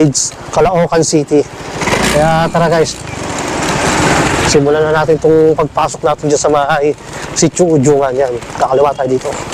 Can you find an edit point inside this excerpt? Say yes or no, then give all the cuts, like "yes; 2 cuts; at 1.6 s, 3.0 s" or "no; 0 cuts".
no; 0 cuts